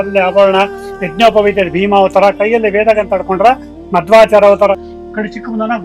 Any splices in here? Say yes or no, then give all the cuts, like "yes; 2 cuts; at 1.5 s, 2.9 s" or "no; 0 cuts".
yes; 1 cut; at 4.9 s